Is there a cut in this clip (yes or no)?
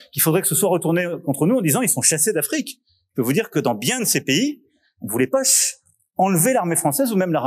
no